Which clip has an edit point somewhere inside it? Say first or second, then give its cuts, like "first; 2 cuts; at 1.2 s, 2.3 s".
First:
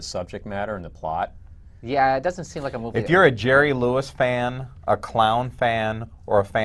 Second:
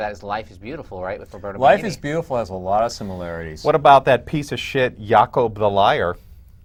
first; 1 cut; at 1.4 s